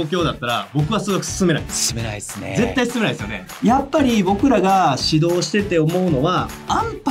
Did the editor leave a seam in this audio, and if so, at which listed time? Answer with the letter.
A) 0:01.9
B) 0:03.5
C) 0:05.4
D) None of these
B